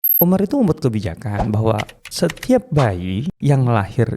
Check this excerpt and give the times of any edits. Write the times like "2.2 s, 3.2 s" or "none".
2.0 s, 3.3 s